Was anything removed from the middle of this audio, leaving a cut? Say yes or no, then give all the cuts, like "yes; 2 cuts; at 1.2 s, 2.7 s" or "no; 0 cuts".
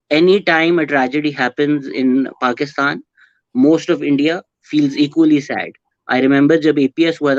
no; 0 cuts